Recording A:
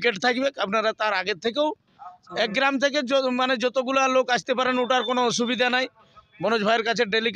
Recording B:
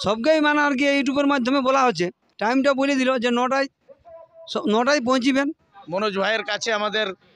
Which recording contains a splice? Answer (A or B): B